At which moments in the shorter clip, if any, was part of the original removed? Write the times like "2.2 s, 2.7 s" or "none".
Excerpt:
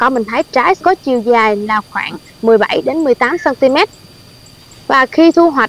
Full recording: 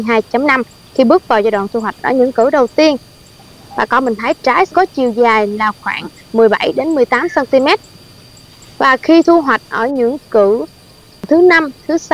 none